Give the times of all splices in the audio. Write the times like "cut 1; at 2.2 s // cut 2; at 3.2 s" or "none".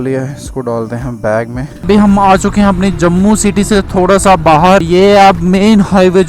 cut 1; at 1.8 s // cut 2; at 4.9 s